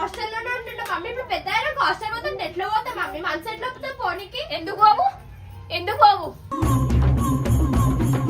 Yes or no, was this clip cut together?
no